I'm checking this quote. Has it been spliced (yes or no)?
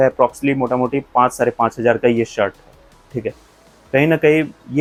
no